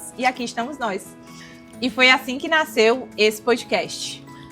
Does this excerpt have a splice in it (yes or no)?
yes